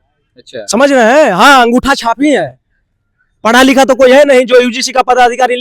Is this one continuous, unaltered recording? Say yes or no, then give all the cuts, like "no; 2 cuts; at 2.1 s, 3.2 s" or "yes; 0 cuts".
yes; 0 cuts